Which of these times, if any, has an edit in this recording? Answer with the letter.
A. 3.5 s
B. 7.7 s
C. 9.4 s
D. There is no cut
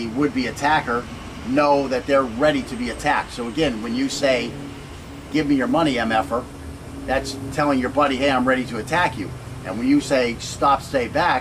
A